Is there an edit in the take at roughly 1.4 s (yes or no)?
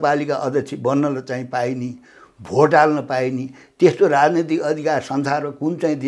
no